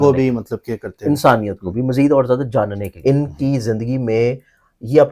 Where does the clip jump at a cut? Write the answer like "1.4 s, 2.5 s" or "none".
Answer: 2.9 s